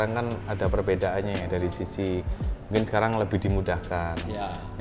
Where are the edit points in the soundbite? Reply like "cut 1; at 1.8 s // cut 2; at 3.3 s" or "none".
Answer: none